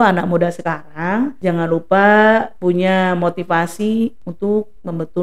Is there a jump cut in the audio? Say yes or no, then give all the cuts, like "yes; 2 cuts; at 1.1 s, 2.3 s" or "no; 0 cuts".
yes; 3 cuts; at 1.4 s, 2.5 s, 4.2 s